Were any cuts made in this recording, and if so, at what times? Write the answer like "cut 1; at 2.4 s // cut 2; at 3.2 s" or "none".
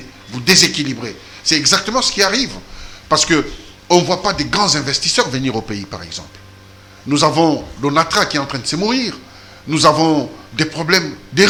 none